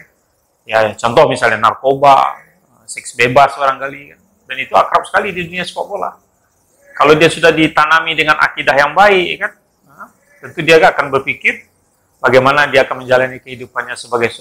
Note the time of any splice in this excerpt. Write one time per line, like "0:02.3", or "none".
none